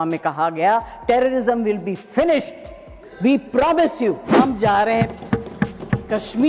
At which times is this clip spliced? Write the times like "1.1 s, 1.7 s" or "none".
4.2 s